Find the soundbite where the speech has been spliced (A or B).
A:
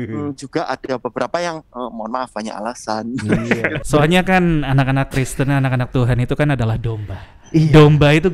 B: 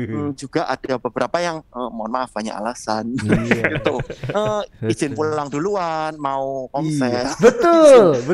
A